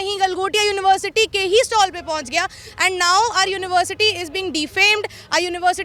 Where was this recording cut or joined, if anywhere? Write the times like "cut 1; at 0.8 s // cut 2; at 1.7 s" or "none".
none